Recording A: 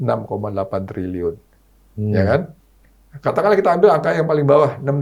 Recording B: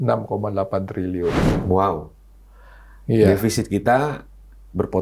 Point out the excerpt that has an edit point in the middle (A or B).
B